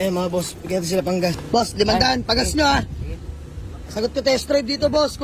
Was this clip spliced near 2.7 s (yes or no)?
no